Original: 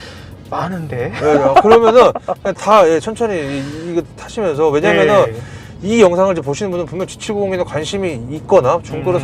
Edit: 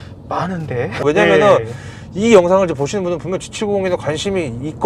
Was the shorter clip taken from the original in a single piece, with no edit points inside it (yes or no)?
no